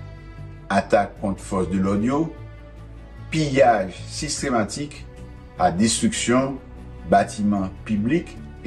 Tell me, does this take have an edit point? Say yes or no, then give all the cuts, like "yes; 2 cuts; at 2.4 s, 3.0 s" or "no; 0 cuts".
no; 0 cuts